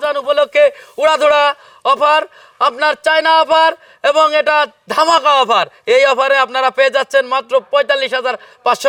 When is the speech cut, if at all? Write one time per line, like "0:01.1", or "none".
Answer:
none